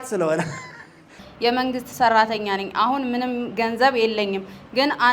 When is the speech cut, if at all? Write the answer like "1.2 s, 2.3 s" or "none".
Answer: 1.2 s

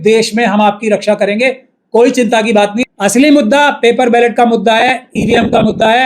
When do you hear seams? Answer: 2.8 s

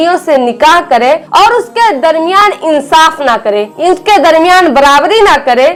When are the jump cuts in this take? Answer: none

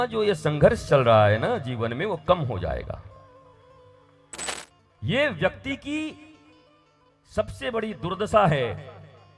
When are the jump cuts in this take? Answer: 4.5 s

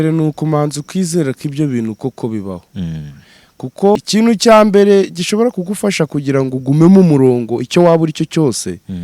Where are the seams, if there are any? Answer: 4.0 s

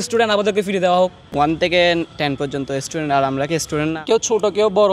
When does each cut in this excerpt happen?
1.5 s, 4.0 s

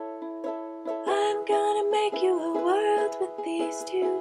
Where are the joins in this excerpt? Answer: 1.0 s

